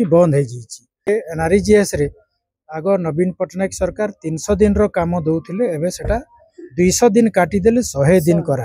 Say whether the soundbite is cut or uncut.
cut